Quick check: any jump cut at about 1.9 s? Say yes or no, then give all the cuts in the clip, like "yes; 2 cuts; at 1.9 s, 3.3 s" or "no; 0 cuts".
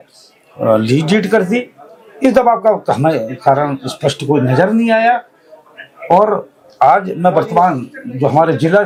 no; 0 cuts